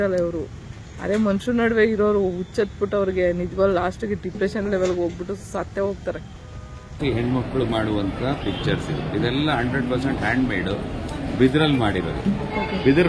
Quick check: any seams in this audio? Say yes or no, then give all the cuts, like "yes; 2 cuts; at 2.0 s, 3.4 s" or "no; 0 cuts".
yes; 1 cut; at 7.0 s